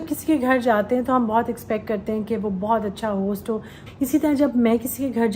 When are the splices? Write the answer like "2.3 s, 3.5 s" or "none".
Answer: 3.8 s